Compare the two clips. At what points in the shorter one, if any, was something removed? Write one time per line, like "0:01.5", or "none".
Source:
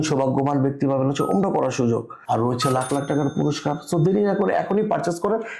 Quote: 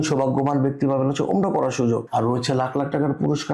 0:02.1